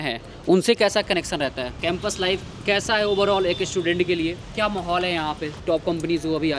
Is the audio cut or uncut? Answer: cut